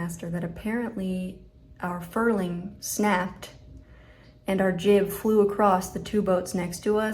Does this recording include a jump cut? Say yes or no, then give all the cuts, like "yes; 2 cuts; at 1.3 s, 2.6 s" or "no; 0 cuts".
yes; 1 cut; at 2.8 s